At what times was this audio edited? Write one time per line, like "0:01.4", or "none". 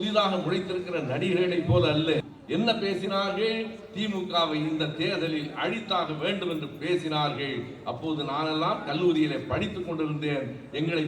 0:02.2